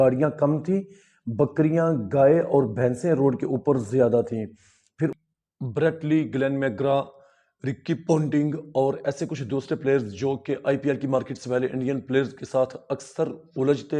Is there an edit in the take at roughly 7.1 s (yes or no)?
no